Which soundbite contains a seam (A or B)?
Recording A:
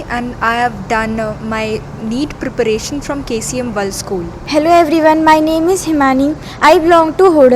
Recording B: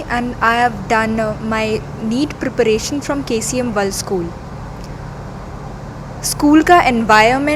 A